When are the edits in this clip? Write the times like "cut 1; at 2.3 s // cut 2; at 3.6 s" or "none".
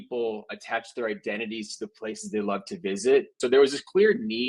cut 1; at 3.3 s